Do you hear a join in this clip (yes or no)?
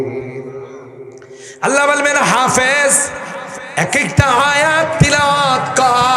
yes